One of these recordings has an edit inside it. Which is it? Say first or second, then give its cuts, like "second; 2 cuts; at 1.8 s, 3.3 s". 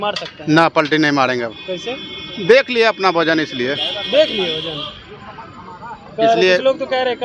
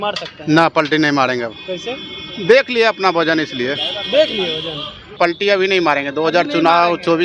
second; 1 cut; at 5.1 s